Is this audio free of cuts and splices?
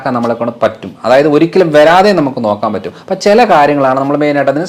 yes; 0 cuts

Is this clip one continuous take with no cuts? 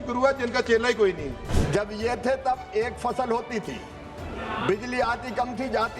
no; 1 cut; at 1.5 s

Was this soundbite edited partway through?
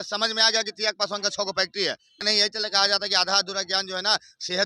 yes; 1 cut; at 2.2 s

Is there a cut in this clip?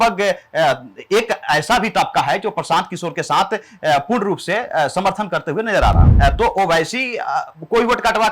yes; 1 cut; at 6.1 s

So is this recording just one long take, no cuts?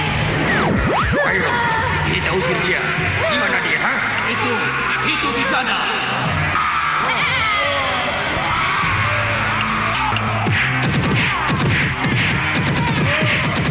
yes; 0 cuts

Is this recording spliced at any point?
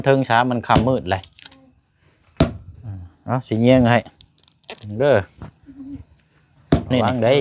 no; 0 cuts

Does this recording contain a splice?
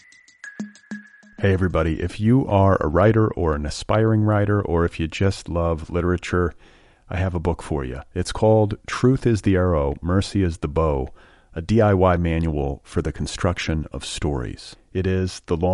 yes; 1 cut; at 0.9 s

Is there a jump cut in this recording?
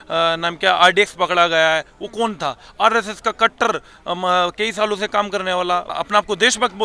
yes; 1 cut; at 5.9 s

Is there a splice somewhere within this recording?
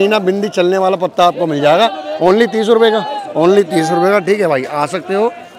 no; 0 cuts

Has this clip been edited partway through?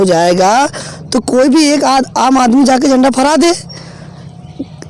no; 0 cuts

